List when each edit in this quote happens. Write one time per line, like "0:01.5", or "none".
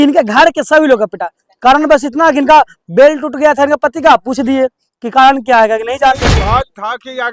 0:06.4